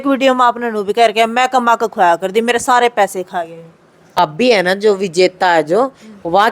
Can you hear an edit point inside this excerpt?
yes; 1 cut; at 4.2 s

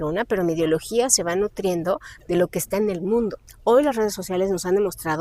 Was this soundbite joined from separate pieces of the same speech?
yes; 1 cut; at 3.5 s

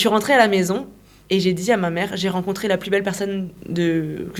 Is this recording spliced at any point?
no; 0 cuts

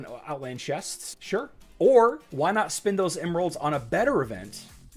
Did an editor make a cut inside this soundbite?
yes; 2 cuts; at 1.2 s, 2.2 s

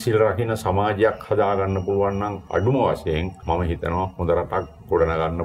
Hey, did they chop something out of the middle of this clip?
no; 0 cuts

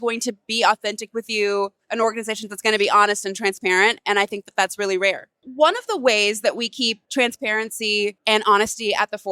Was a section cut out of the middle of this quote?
yes; 3 cuts; at 5.4 s, 7.0 s, 8.2 s

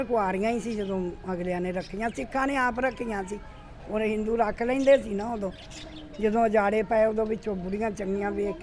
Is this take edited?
no; 0 cuts

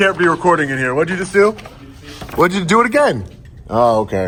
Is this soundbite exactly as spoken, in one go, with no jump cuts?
yes; 0 cuts

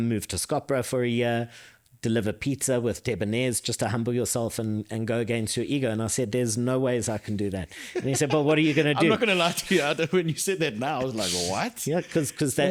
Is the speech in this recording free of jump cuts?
yes; 0 cuts

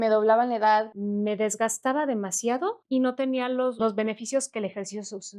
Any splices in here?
yes; 3 cuts; at 0.9 s, 2.8 s, 3.8 s

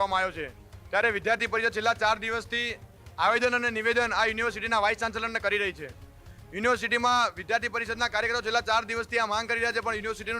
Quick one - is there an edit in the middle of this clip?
no; 0 cuts

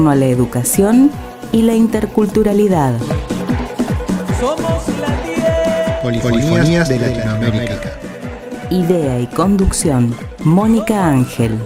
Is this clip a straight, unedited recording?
yes; 0 cuts

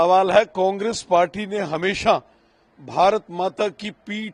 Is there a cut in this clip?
no; 0 cuts

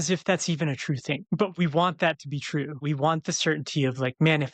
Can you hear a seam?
yes; 2 cuts; at 1.2 s, 2.8 s

